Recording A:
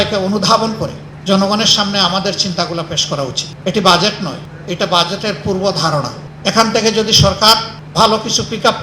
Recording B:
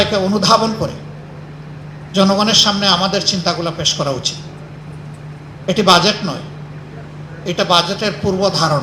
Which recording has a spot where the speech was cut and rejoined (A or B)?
A